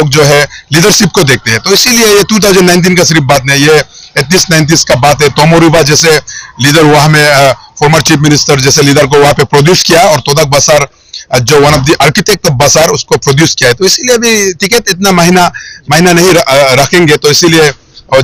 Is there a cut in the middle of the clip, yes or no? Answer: no